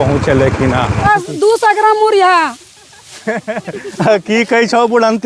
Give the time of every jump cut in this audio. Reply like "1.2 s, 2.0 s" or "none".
1.0 s